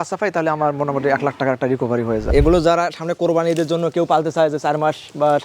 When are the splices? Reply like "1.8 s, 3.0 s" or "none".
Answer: 2.2 s